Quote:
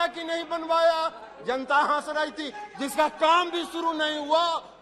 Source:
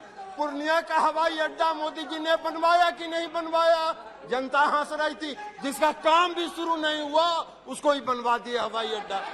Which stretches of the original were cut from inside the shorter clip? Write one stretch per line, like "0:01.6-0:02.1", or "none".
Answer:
none